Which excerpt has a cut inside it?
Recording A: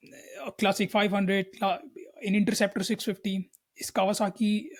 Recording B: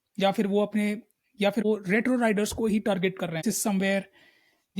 B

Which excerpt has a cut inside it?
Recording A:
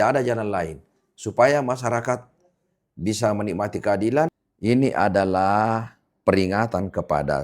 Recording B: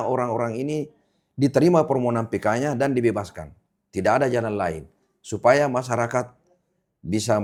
A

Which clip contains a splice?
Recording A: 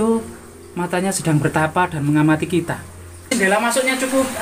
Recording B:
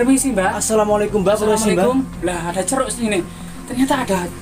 A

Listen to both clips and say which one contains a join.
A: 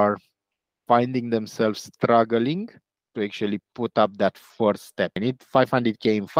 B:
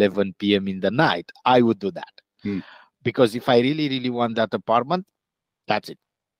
A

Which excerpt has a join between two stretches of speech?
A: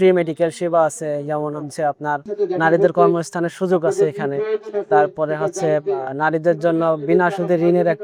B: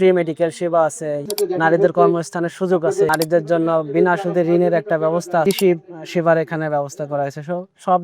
B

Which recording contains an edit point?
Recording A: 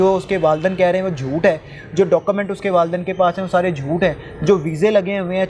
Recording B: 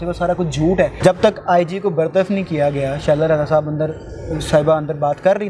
B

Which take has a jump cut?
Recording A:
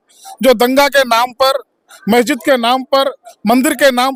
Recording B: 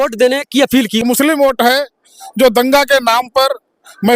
B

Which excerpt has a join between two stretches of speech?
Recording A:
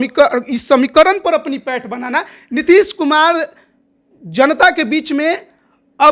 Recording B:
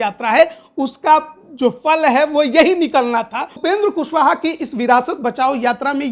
B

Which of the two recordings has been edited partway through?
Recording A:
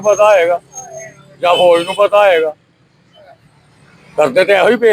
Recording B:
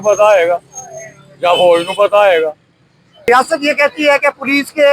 B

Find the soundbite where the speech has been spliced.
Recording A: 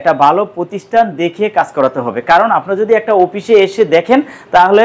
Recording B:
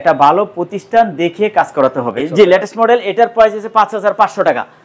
B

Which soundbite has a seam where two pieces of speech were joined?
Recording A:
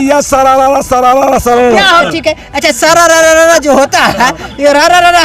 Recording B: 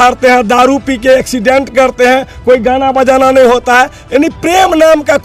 A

